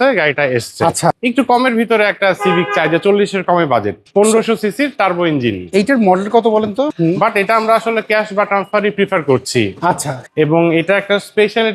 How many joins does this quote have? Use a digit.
4